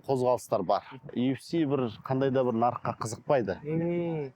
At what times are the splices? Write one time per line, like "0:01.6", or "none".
0:01.1